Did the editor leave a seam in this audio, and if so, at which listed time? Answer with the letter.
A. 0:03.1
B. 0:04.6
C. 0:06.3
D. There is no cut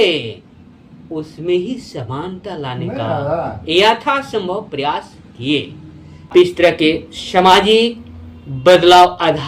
C